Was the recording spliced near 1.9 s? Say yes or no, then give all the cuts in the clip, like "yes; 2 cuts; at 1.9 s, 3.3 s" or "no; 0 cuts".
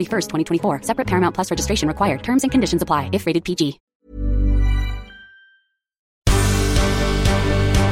no; 2 cuts; at 3.8 s, 6.2 s